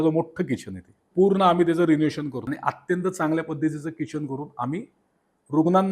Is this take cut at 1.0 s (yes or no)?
yes